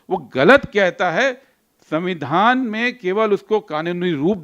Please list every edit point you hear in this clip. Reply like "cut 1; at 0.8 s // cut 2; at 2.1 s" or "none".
none